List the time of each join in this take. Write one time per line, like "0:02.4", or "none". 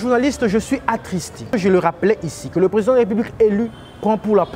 0:01.5